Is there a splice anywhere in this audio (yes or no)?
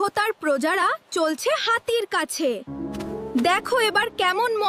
no